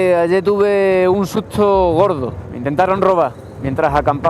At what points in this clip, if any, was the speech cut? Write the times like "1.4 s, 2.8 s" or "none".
none